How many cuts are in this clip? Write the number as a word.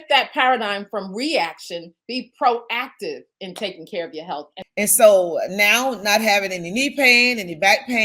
two